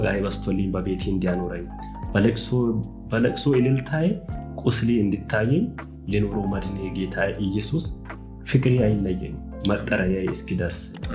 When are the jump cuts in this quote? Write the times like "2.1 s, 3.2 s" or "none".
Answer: none